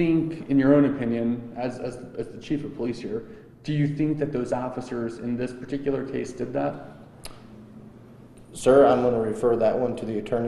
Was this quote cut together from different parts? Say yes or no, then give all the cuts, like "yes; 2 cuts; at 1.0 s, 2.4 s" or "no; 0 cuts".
no; 0 cuts